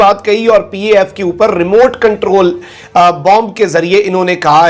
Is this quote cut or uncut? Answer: uncut